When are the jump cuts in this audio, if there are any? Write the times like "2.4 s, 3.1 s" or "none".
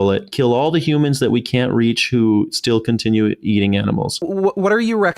4.3 s